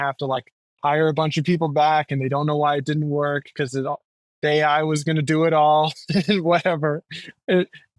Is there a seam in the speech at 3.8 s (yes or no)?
no